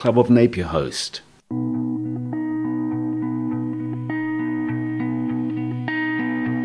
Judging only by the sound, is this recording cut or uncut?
cut